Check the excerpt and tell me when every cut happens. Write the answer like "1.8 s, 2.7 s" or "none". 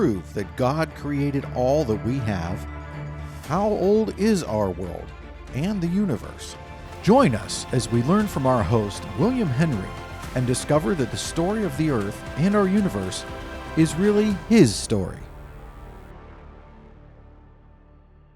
15.2 s